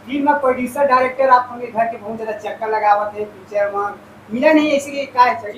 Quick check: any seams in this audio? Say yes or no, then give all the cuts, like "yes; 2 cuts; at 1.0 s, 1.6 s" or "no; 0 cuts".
no; 0 cuts